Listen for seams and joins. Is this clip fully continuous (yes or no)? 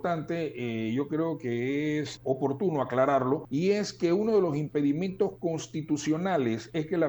no